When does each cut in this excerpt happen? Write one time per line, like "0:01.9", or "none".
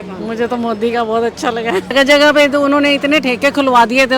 0:01.9